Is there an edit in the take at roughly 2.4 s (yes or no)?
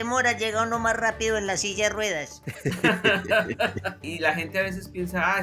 no